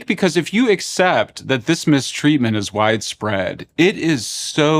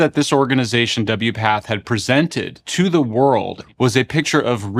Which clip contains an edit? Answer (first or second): second